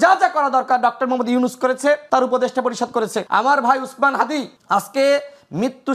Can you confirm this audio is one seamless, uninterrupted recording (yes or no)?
no